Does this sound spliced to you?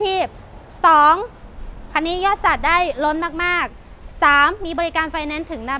no; 0 cuts

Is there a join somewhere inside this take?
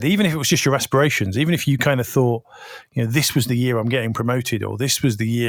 no; 0 cuts

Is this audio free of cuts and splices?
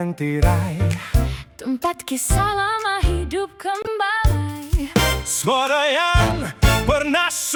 yes; 0 cuts

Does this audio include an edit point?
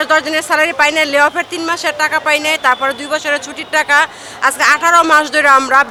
no; 0 cuts

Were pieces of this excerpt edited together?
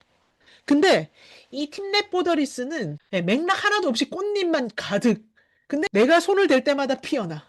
yes; 1 cut; at 3.0 s

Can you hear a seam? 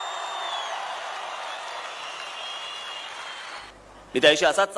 yes; 1 cut; at 3.7 s

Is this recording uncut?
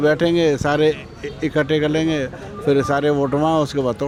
yes; 0 cuts

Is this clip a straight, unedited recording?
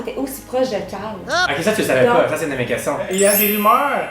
no; 1 cut; at 3.1 s

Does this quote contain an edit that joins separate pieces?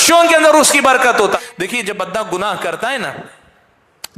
yes; 1 cut; at 1.3 s

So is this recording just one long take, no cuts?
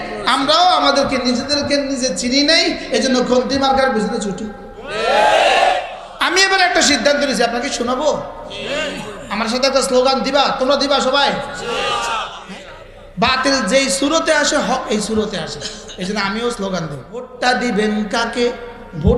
no; 3 cuts; at 6.0 s, 12.4 s, 17.3 s

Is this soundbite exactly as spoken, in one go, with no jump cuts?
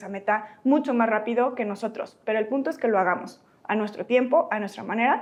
yes; 0 cuts

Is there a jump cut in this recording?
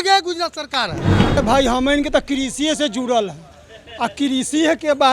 yes; 1 cut; at 1.4 s

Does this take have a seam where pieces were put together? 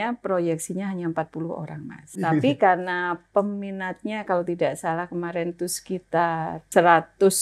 yes; 2 cuts; at 2.2 s, 6.6 s

